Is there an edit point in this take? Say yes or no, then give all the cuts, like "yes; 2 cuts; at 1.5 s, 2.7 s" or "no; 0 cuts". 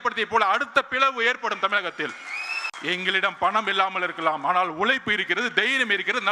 yes; 1 cut; at 2.7 s